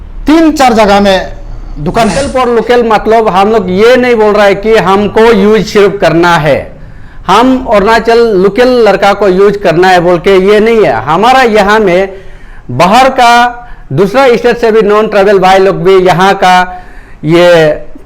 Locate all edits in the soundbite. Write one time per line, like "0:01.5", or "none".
0:02.2